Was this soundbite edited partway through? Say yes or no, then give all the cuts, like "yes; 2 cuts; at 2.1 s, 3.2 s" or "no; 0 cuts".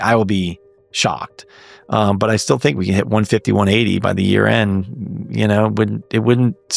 no; 0 cuts